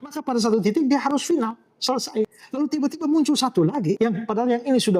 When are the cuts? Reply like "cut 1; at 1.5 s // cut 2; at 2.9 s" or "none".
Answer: cut 1; at 2.4 s // cut 2; at 4.0 s